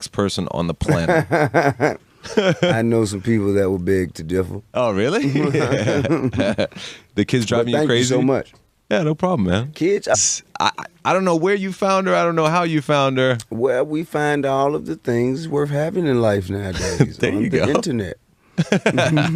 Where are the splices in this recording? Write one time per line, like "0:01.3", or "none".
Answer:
none